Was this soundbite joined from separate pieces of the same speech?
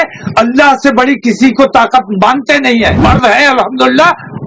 yes; 1 cut; at 3.0 s

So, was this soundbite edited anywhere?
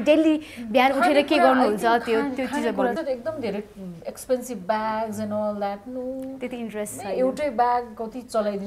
yes; 1 cut; at 3.0 s

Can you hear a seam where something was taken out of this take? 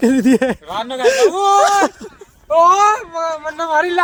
no; 0 cuts

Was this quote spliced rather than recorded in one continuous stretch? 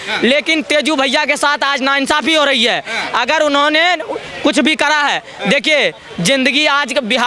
no; 0 cuts

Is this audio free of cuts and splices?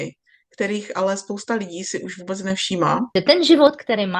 no; 1 cut; at 3.1 s

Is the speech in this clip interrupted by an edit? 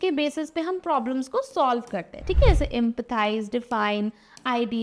no; 0 cuts

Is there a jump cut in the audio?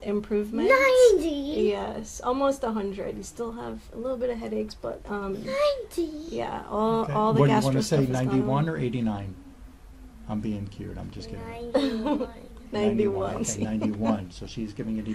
no; 0 cuts

